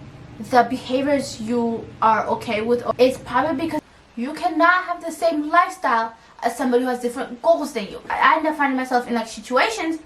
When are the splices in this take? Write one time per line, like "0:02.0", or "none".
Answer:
0:02.9
0:03.8
0:08.0